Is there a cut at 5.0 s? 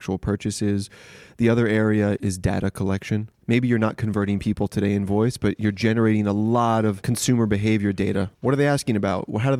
no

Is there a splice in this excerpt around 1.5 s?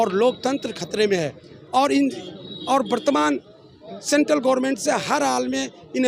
no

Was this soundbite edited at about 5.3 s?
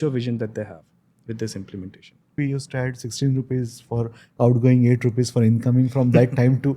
no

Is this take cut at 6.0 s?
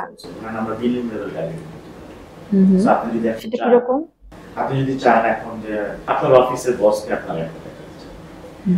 yes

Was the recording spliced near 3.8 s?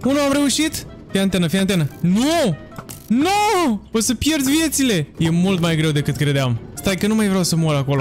yes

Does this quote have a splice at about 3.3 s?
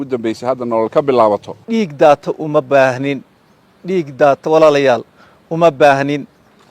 no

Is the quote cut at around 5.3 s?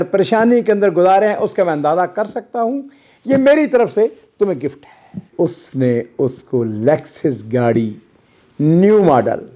yes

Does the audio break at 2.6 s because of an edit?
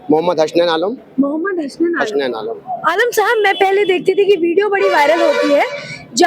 no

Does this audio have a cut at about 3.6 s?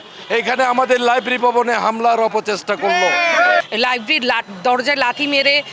yes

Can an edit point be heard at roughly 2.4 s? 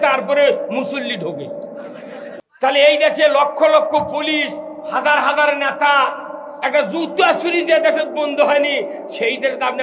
yes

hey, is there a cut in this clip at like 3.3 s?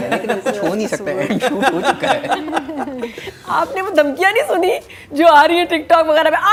no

